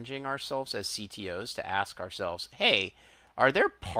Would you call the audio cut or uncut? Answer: uncut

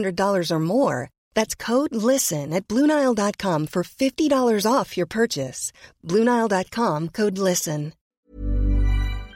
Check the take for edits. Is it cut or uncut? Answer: cut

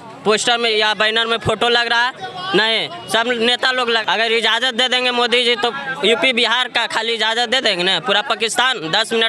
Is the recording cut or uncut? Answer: cut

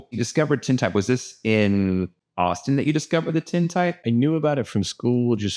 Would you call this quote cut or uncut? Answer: cut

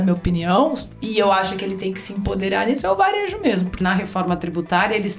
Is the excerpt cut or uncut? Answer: cut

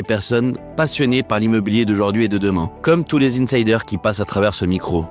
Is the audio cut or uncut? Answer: cut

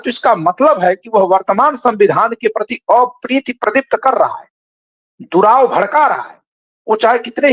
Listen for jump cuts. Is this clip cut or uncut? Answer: uncut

